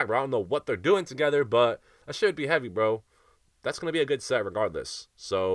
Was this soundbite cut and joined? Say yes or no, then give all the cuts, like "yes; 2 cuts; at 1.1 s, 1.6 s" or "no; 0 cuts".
no; 0 cuts